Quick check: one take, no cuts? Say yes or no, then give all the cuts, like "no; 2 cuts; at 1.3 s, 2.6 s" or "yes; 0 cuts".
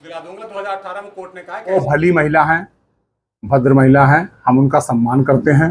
no; 1 cut; at 1.7 s